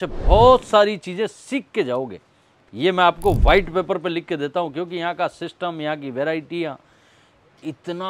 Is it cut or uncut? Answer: uncut